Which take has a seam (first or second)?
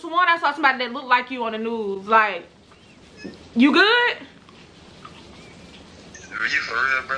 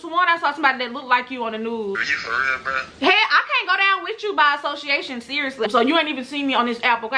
second